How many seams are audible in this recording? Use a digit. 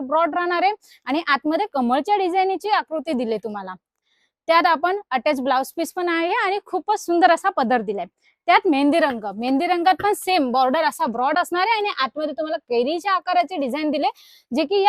0